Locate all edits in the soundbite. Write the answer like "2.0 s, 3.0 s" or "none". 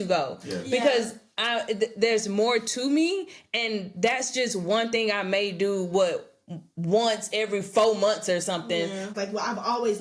9.1 s